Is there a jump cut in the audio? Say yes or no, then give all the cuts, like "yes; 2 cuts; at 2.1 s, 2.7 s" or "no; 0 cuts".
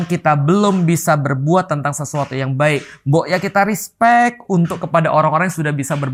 no; 0 cuts